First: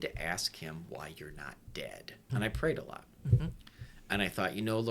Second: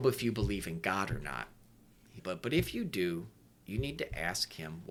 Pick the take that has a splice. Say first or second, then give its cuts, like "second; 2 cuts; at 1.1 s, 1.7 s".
first; 1 cut; at 2.2 s